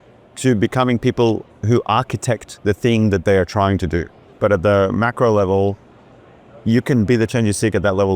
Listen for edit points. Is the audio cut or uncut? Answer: cut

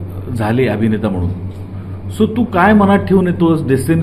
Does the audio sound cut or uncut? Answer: uncut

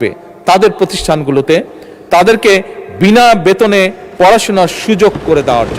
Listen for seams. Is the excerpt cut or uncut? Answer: uncut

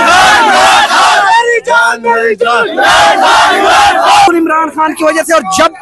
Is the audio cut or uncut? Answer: cut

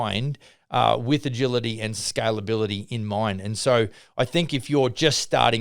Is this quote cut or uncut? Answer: cut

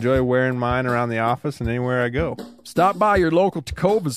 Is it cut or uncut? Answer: cut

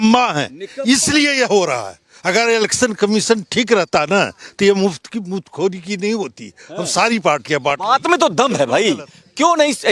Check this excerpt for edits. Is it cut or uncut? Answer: uncut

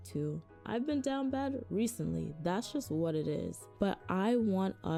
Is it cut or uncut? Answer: uncut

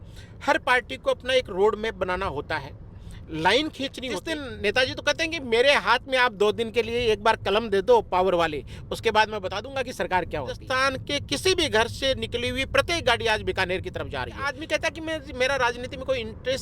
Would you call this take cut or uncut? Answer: cut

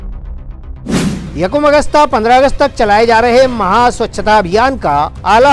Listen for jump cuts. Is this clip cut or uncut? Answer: cut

